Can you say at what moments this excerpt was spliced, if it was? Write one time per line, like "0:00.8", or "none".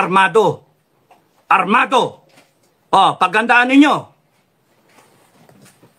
none